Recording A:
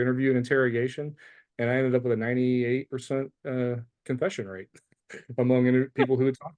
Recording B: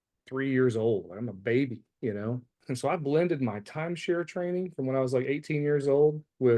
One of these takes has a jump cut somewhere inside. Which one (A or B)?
B